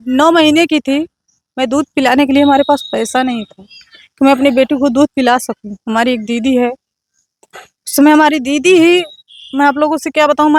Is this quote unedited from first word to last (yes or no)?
yes